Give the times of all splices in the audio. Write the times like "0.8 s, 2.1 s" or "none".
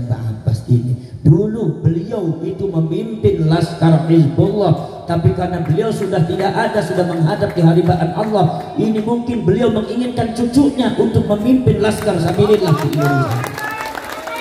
none